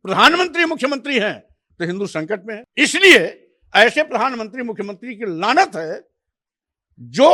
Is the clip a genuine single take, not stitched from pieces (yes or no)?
no